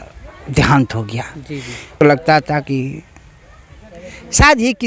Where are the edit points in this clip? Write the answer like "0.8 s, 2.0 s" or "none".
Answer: 2.0 s